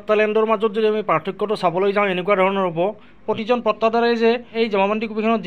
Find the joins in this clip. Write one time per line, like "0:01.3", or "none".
0:03.2
0:04.5